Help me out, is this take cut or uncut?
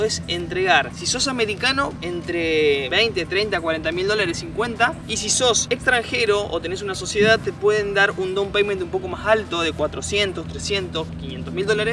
uncut